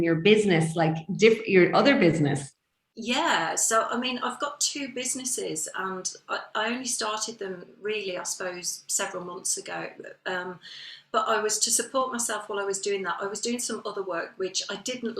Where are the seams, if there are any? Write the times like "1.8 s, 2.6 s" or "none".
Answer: none